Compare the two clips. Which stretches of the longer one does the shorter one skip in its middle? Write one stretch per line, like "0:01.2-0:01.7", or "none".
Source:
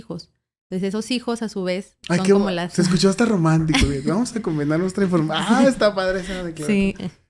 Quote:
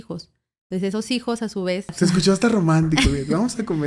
0:01.9-0:02.7